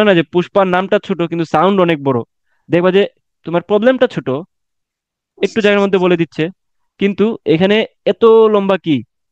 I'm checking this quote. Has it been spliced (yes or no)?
no